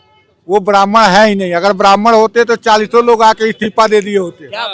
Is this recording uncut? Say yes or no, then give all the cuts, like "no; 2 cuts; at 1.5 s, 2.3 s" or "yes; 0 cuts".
yes; 0 cuts